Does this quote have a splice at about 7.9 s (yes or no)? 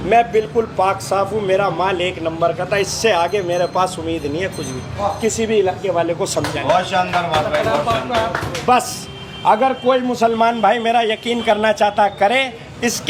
no